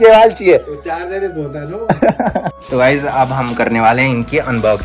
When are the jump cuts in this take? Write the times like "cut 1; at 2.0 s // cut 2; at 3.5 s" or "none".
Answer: cut 1; at 2.6 s